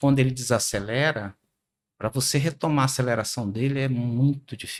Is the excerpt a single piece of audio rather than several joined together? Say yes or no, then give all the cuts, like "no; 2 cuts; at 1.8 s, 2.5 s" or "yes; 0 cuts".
yes; 0 cuts